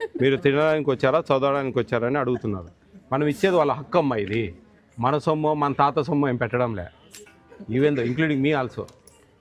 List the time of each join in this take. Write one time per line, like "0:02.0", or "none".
none